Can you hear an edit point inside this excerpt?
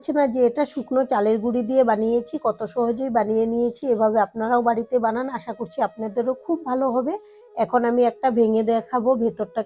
no; 0 cuts

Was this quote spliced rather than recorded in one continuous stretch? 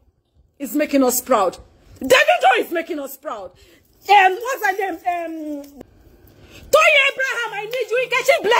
yes; 1 cut; at 5.7 s

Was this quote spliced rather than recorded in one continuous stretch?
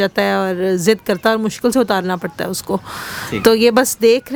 no; 0 cuts

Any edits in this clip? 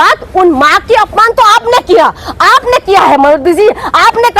no; 0 cuts

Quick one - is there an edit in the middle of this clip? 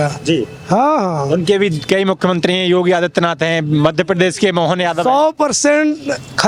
no; 0 cuts

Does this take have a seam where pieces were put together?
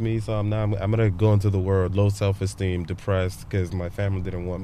yes; 1 cut; at 1.9 s

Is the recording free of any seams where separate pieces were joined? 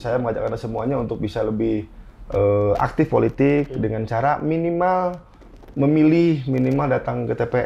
yes; 0 cuts

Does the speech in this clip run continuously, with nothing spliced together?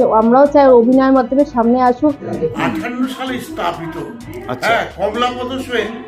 no; 1 cut; at 2.4 s

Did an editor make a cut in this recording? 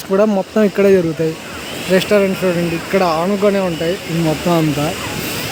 no; 0 cuts

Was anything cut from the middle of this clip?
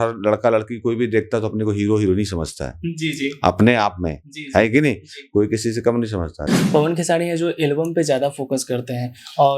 yes; 1 cut; at 6.5 s

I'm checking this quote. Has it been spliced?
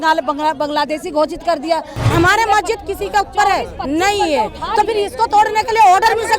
yes; 1 cut; at 2.0 s

